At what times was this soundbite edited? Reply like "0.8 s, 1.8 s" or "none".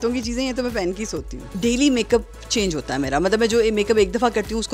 1.5 s